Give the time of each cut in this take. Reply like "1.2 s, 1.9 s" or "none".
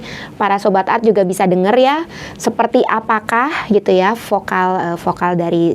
none